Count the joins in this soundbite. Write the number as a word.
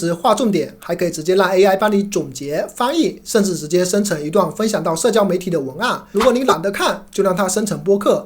one